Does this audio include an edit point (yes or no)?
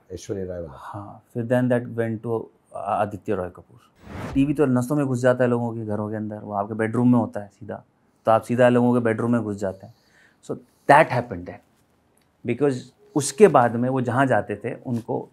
yes